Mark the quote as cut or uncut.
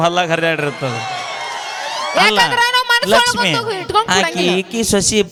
uncut